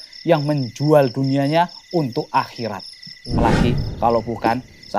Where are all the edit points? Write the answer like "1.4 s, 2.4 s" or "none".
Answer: 3.4 s